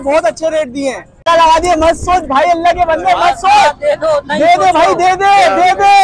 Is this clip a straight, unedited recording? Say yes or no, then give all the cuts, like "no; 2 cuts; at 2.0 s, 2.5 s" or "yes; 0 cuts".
no; 1 cut; at 1.3 s